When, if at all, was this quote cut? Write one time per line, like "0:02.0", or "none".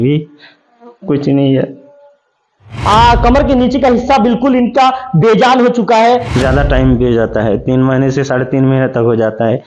0:02.7
0:06.3